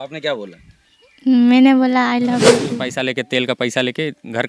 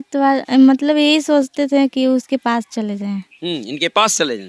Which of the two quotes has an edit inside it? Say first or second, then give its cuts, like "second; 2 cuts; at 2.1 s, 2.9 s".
first; 1 cut; at 2.5 s